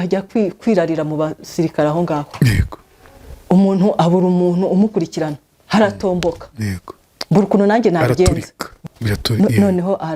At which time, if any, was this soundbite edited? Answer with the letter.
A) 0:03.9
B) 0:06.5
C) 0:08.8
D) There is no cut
C